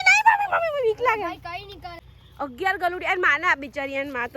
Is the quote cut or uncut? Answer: cut